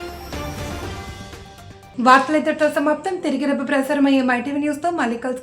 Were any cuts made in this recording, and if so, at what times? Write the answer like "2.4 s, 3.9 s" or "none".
none